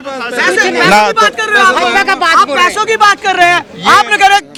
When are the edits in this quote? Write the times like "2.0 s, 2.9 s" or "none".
none